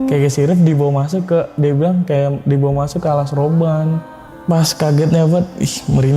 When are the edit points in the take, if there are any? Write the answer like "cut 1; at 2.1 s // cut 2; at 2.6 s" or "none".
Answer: cut 1; at 4.1 s